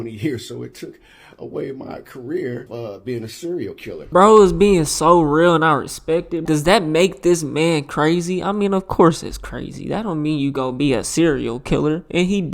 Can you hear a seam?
yes; 3 cuts; at 2.7 s, 4.1 s, 6.4 s

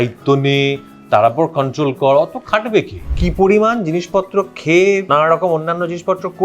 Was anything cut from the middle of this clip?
yes; 2 cuts; at 3.0 s, 5.0 s

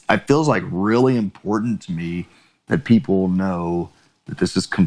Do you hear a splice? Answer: no; 0 cuts

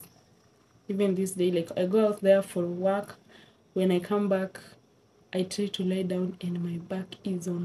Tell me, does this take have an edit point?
no; 0 cuts

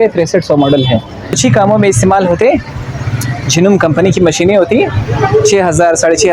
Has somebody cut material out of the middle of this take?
yes; 1 cut; at 1.4 s

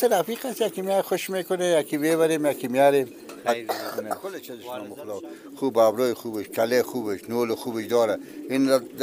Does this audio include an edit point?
yes; 1 cut; at 4.6 s

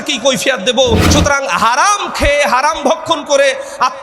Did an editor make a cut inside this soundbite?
yes; 1 cut; at 1.1 s

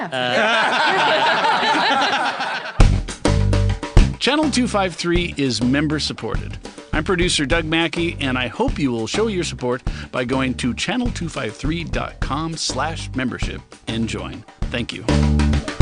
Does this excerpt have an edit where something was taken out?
yes; 1 cut; at 2.6 s

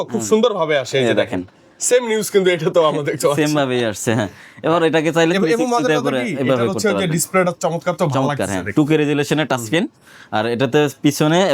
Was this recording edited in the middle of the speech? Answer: no; 0 cuts

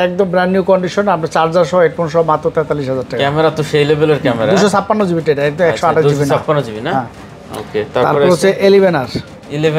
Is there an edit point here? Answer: no; 0 cuts

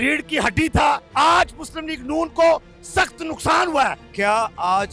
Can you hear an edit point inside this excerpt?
yes; 2 cuts; at 1.1 s, 4.1 s

